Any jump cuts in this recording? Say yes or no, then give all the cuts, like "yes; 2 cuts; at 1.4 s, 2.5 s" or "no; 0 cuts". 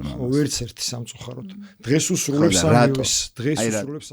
no; 0 cuts